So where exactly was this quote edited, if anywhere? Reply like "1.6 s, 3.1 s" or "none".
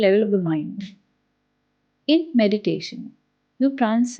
none